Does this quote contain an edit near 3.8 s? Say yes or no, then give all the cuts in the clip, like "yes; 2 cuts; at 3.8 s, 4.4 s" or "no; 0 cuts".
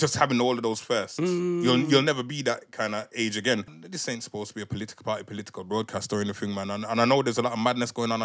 yes; 1 cut; at 3.8 s